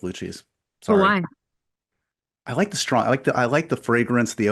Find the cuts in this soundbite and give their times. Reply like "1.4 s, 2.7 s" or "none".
none